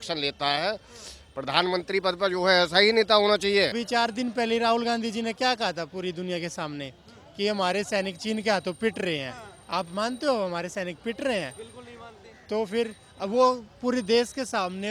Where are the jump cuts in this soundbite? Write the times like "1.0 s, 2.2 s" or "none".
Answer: 3.8 s